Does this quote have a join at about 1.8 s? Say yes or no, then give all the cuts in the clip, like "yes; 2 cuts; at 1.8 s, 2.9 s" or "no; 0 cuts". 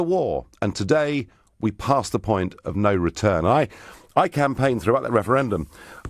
yes; 1 cut; at 1.8 s